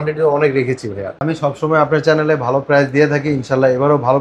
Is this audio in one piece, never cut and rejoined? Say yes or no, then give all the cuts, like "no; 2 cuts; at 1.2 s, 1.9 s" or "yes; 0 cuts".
no; 1 cut; at 1.2 s